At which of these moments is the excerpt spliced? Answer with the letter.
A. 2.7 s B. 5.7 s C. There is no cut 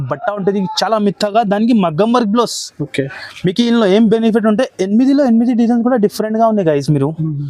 C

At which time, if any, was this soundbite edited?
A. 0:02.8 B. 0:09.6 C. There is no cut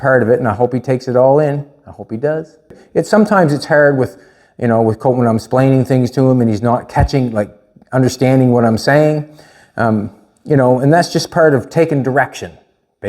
A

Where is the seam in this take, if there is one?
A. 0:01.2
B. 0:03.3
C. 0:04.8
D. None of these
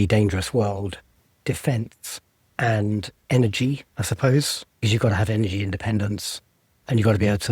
C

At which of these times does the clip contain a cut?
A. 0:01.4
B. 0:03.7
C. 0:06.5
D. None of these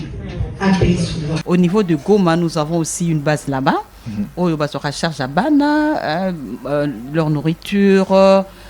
A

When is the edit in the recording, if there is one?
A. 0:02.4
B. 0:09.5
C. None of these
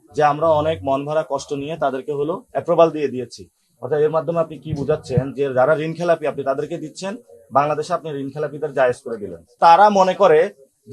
B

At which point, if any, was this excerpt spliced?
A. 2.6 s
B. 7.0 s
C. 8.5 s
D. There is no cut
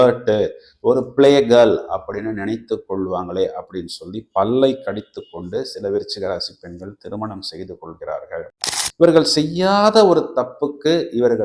C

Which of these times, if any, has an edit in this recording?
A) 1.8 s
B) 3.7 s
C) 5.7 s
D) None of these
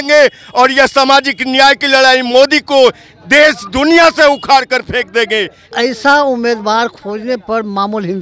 C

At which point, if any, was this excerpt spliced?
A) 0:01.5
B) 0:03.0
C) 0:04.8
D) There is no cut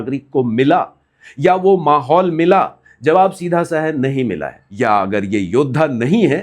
C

